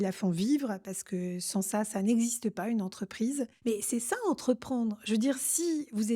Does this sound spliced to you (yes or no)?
yes